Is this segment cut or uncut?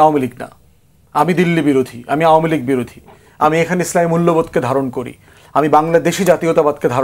uncut